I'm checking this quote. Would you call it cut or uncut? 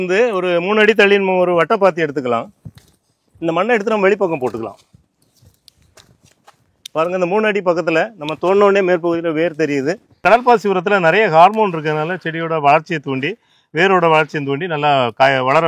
cut